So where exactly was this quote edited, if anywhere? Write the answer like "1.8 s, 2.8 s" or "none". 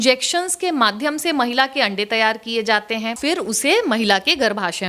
3.2 s